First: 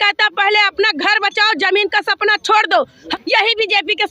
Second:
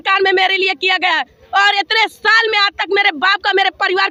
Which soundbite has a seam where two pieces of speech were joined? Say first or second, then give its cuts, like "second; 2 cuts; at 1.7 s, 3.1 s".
first; 1 cut; at 3.0 s